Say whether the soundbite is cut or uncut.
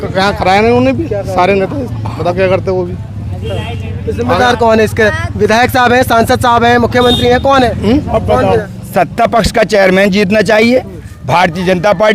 cut